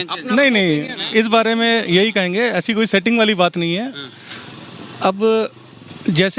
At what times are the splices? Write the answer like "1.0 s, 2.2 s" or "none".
none